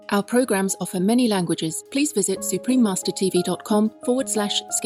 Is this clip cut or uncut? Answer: cut